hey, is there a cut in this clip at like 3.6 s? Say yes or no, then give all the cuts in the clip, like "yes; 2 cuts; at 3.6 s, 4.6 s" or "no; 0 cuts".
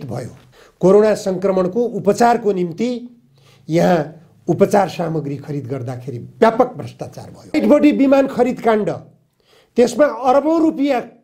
no; 1 cut; at 7.5 s